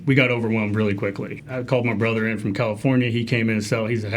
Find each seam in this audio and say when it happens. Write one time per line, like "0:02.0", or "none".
0:01.4